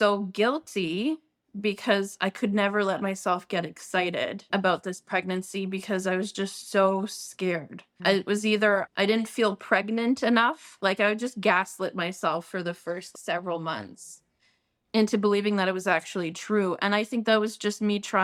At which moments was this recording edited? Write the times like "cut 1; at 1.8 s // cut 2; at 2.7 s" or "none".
none